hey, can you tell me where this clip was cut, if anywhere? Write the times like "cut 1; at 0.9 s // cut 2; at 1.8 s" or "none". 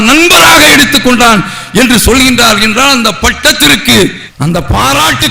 none